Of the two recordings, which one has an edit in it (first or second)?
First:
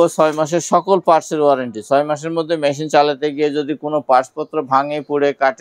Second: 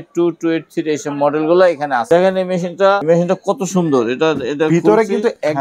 second